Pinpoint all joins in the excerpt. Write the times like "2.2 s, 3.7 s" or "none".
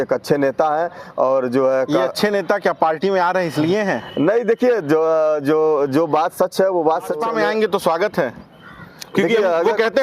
7.2 s

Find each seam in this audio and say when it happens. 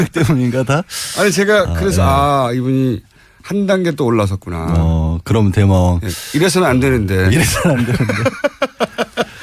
8.4 s

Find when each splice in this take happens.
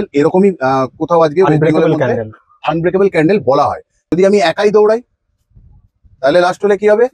4.1 s

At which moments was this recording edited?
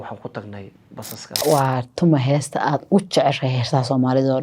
1.4 s

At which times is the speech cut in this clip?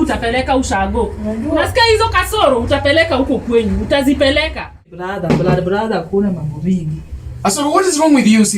5.0 s

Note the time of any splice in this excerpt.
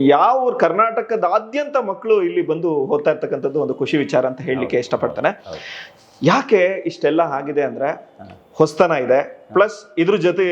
none

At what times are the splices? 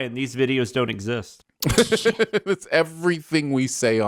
none

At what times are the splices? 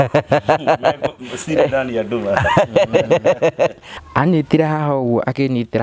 3.9 s

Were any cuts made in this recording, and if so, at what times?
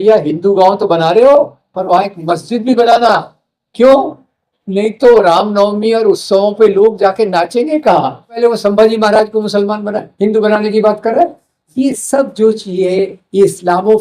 8.4 s

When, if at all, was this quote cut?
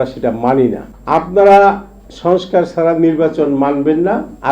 0.9 s

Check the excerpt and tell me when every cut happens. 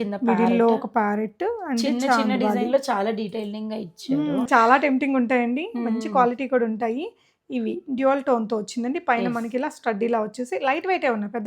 4.5 s

